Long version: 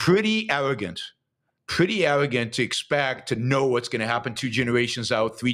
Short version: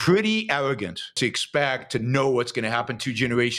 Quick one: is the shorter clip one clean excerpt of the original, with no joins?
no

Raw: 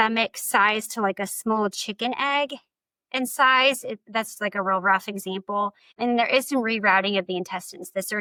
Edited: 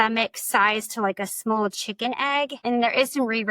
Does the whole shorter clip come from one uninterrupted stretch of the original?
no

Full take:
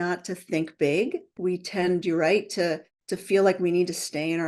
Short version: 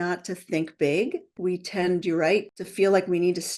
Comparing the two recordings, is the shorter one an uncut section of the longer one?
no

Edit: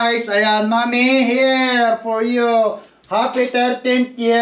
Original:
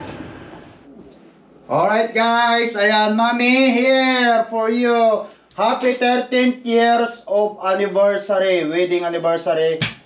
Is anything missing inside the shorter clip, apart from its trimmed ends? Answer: no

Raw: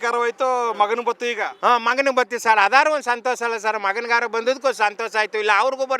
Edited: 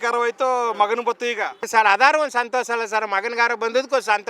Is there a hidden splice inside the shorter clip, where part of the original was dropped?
yes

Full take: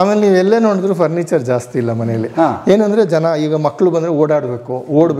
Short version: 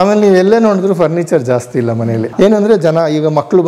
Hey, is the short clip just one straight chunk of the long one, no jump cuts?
no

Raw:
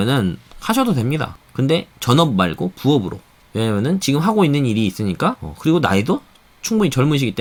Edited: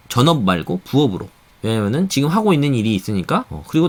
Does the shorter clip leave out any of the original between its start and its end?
no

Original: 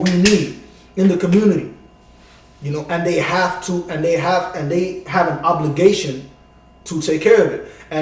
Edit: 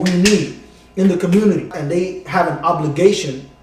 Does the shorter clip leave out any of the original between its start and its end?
yes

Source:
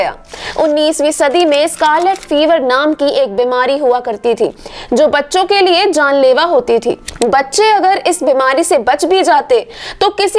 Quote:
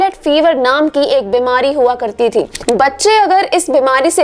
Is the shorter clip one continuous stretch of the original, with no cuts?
no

